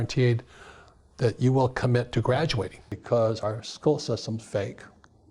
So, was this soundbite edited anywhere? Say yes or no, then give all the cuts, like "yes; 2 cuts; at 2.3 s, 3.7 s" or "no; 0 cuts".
yes; 1 cut; at 2.9 s